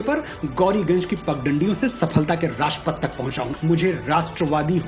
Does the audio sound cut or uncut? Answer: cut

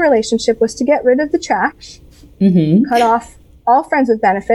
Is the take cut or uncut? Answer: uncut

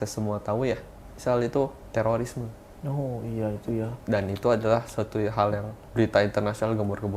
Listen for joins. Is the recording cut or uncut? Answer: cut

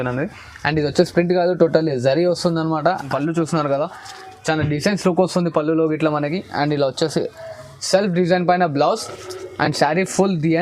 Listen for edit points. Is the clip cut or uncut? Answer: cut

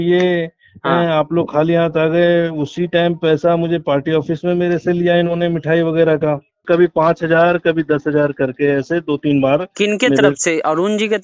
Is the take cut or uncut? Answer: cut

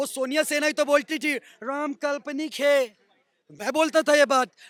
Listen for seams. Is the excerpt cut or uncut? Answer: uncut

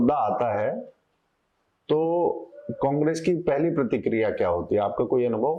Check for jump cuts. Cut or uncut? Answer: uncut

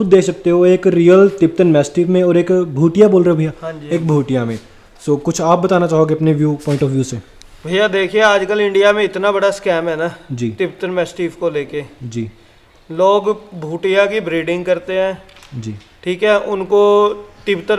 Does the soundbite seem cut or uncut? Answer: uncut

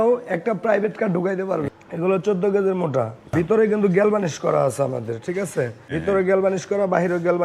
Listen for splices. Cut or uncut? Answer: cut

